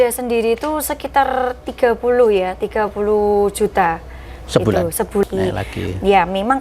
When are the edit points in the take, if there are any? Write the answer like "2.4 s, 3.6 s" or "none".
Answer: 5.2 s